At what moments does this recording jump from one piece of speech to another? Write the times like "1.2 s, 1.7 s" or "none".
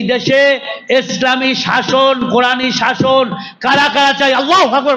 none